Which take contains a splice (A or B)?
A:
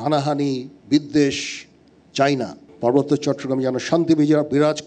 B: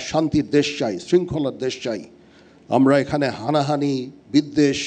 A